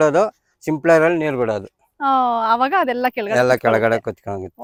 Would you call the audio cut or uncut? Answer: uncut